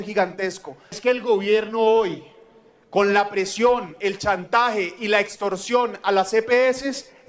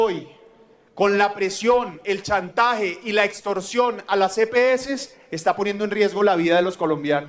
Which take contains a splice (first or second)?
first